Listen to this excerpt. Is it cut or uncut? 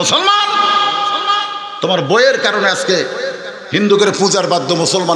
uncut